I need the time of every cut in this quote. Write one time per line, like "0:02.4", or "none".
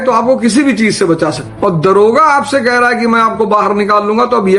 0:01.5